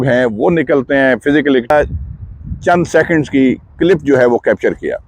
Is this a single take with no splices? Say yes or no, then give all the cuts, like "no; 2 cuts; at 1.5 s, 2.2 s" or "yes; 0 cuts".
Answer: no; 1 cut; at 1.7 s